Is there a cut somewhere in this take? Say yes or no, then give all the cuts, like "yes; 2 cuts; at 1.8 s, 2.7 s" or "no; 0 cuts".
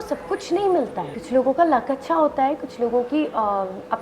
yes; 1 cut; at 1.1 s